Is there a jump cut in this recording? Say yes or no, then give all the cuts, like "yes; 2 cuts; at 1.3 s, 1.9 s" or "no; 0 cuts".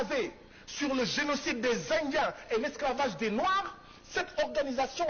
no; 0 cuts